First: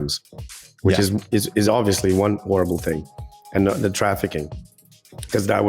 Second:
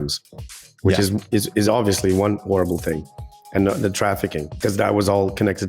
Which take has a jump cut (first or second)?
second